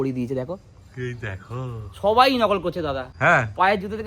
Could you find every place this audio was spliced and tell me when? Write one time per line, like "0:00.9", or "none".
0:03.1